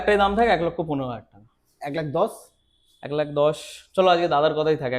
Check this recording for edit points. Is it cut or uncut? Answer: uncut